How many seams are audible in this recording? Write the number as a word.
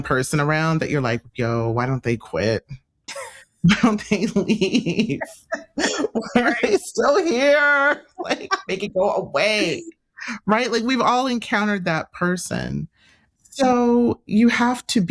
one